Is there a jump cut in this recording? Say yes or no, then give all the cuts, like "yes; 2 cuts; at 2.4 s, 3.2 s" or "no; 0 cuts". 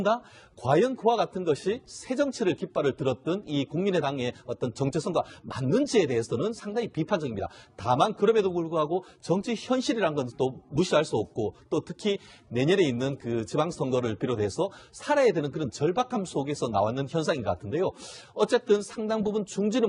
no; 0 cuts